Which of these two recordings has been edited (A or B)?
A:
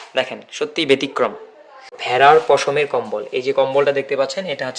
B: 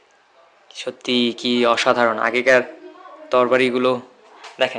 A